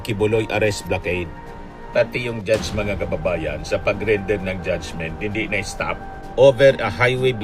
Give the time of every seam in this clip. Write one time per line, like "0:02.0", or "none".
0:06.2